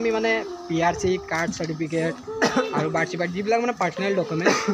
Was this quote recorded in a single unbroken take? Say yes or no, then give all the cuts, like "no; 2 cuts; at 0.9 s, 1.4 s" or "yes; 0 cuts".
yes; 0 cuts